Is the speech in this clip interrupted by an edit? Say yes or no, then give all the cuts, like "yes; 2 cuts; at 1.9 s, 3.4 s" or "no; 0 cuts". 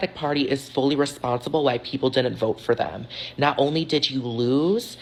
no; 0 cuts